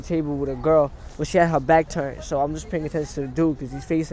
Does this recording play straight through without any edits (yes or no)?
yes